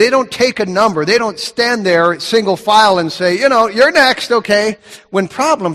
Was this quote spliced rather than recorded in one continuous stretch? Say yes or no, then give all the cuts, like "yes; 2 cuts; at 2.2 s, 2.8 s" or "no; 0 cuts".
yes; 1 cut; at 1.2 s